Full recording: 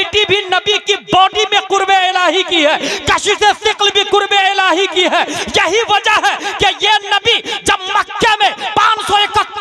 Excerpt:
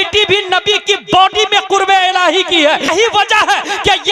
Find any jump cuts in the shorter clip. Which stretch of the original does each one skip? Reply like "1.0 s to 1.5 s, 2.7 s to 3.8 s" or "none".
2.9 s to 5.6 s